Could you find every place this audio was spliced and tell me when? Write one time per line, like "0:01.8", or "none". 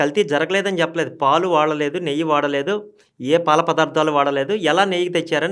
none